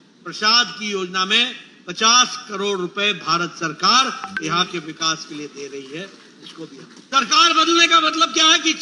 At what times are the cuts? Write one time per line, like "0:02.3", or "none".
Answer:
0:06.9